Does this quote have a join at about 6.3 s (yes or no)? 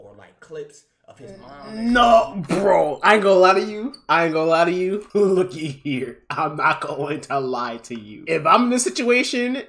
no